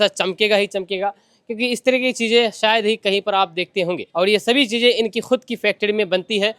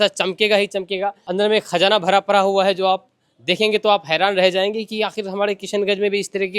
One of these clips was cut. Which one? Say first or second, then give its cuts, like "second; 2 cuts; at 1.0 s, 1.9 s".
second; 1 cut; at 1.2 s